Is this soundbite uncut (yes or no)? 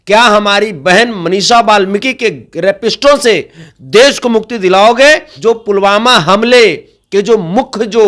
no